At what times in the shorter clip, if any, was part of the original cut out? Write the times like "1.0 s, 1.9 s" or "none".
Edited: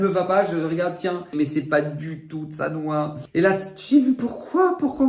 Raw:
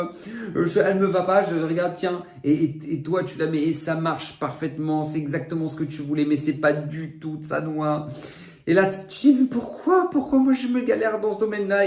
1.4 s, 3.2 s